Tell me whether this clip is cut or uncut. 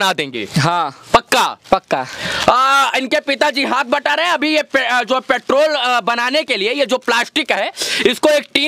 uncut